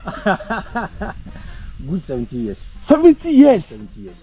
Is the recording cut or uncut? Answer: uncut